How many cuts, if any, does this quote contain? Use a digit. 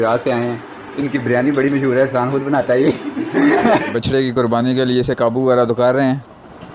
1